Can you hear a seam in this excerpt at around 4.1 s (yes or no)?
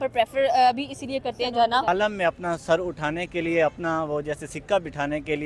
no